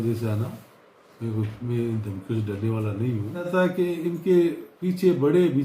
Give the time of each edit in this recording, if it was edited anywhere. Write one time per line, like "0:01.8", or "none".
0:03.5